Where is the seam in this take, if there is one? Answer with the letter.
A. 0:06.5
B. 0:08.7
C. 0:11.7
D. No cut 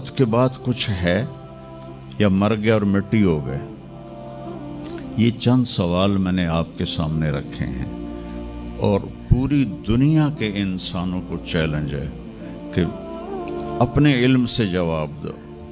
D